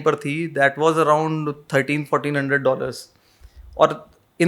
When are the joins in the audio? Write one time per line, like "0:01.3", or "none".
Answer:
none

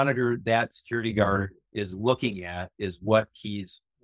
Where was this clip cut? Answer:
none

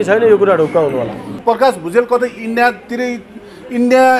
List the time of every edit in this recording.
0:01.3

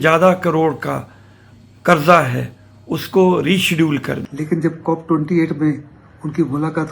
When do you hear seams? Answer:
0:04.2

